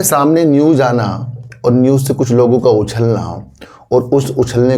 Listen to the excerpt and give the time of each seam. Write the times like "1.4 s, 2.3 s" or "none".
none